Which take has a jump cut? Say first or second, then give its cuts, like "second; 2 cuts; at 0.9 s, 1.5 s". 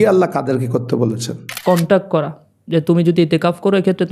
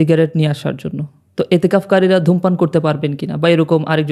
first; 1 cut; at 1.5 s